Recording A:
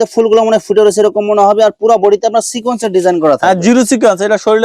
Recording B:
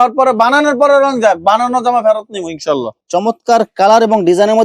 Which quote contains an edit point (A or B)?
B